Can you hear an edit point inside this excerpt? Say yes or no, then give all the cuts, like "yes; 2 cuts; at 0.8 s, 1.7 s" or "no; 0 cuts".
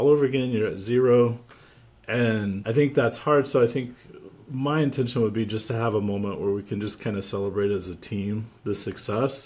yes; 1 cut; at 2.6 s